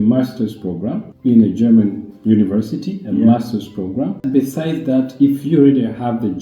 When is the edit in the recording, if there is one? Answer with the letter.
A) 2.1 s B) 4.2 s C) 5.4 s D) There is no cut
B